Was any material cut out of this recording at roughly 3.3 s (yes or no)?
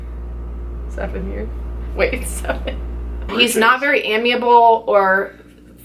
yes